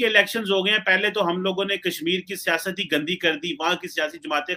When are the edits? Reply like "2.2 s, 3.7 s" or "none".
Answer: none